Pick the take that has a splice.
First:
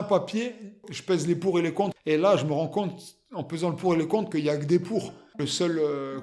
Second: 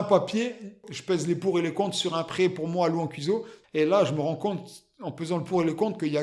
first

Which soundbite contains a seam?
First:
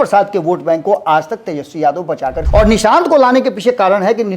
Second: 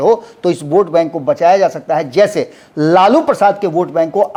first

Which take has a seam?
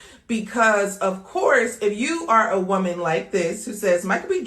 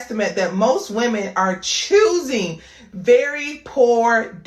first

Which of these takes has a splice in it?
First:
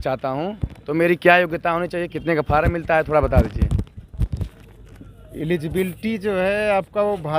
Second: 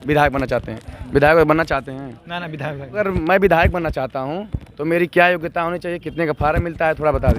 second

